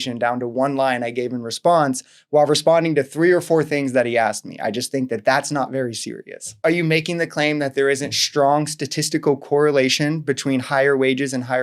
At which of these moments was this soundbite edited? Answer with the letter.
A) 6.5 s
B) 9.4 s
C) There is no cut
A